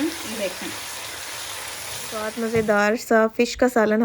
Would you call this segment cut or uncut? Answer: cut